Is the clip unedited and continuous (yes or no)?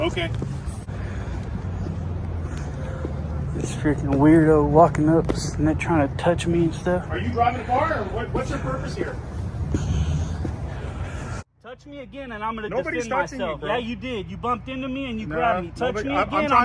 no